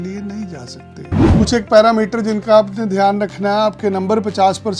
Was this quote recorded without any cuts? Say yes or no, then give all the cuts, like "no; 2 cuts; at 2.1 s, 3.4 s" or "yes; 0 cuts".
no; 1 cut; at 1.3 s